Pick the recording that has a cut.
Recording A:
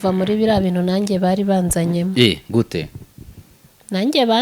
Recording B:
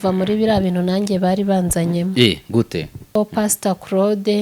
B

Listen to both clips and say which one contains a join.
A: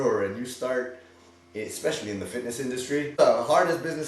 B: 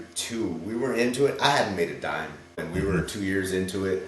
A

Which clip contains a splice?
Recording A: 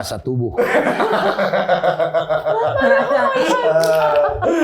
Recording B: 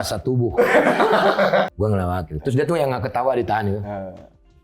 B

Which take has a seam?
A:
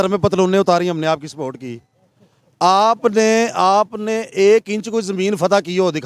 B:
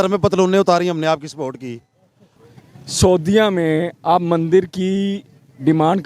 B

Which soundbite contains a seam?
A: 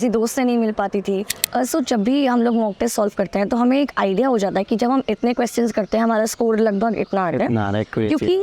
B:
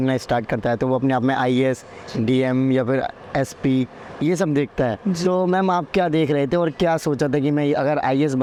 A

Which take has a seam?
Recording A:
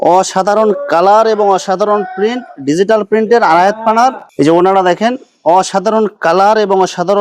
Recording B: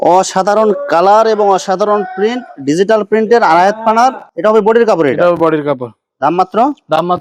A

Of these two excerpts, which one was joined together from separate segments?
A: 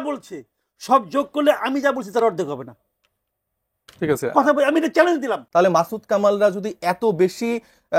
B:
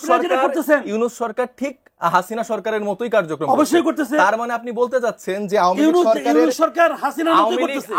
A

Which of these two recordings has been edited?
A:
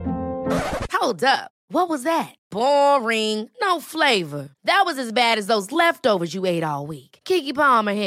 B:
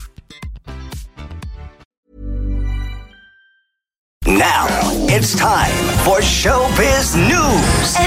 B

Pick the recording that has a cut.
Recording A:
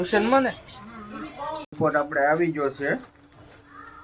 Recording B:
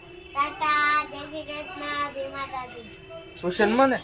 A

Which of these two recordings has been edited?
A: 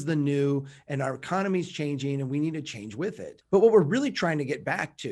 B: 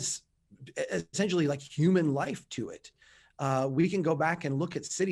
A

